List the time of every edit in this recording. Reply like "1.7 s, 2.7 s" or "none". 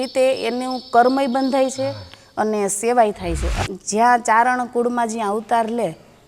3.5 s